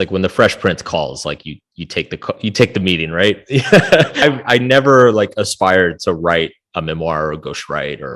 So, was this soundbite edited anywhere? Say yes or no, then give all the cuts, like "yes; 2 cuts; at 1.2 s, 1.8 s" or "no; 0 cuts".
yes; 1 cut; at 4.1 s